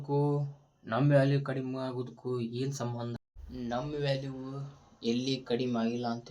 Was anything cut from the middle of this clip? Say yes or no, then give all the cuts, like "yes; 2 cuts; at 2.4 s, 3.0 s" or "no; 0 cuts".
yes; 1 cut; at 3.1 s